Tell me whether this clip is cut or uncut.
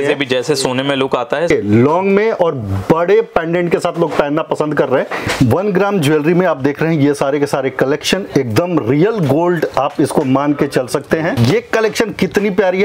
cut